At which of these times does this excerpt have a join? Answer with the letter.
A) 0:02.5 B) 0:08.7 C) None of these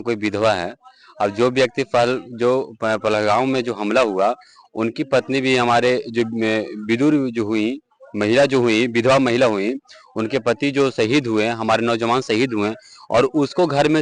C